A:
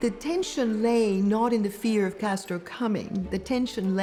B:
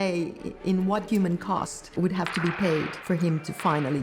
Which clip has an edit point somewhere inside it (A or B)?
B